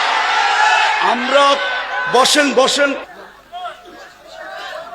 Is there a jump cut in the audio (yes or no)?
yes